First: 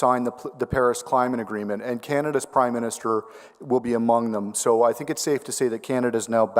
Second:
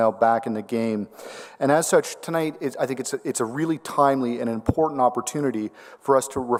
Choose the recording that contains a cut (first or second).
first